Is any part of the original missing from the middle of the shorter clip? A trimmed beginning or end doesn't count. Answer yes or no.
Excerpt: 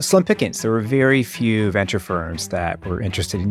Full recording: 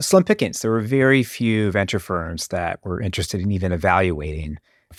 no